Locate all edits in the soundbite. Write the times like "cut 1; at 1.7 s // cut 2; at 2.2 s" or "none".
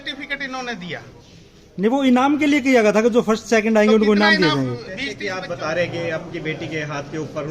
cut 1; at 5.2 s